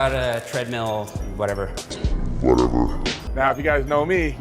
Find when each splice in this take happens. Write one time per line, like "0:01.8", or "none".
0:02.0